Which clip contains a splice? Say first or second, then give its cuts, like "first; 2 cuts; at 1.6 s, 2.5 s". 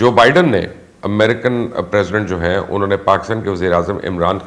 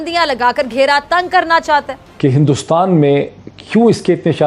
second; 1 cut; at 2.0 s